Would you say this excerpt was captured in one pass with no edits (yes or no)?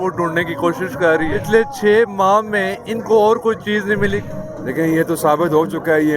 no